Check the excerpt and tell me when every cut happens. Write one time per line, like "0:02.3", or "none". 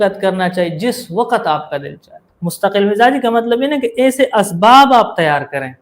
0:02.5